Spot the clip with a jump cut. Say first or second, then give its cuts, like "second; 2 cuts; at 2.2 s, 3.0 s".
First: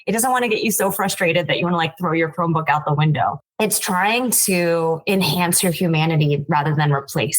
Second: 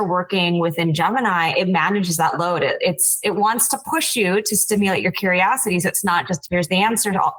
first; 1 cut; at 3.4 s